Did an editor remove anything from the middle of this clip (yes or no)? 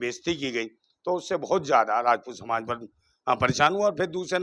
no